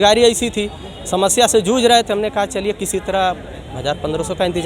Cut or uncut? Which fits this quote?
uncut